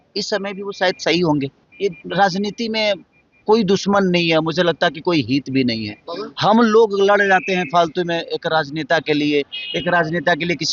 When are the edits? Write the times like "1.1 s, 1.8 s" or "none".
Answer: 1.6 s